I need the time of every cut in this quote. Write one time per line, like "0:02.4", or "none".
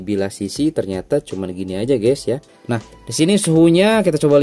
0:02.5